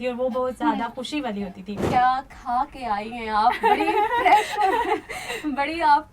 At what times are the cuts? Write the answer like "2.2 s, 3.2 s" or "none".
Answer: 1.8 s